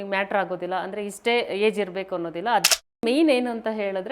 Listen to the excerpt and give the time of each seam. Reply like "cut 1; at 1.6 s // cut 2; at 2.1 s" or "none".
cut 1; at 3.0 s